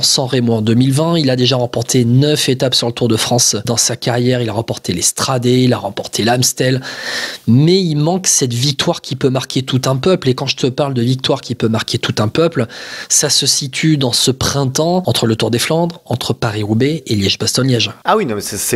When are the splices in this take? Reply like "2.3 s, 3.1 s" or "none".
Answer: none